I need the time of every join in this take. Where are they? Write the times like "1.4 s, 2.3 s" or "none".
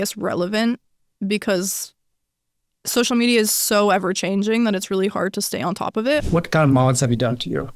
6.2 s